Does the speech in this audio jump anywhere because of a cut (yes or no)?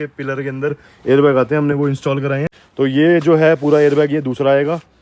yes